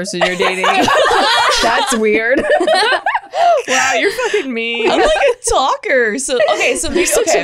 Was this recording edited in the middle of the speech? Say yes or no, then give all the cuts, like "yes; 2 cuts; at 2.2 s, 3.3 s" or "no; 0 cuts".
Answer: no; 0 cuts